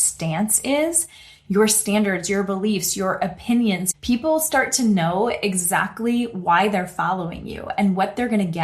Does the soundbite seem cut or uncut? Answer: cut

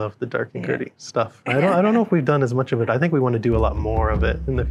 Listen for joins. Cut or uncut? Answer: uncut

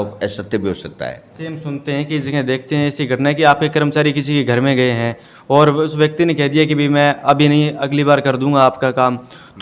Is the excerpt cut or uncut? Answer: cut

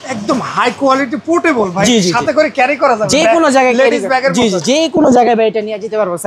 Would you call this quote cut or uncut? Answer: uncut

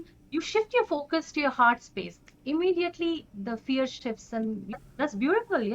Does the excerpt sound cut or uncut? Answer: cut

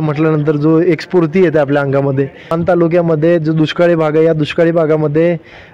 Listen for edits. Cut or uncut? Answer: cut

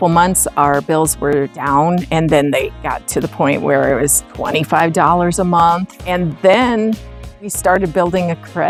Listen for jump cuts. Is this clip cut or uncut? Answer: uncut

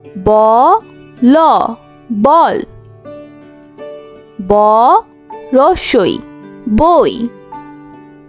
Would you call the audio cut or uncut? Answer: uncut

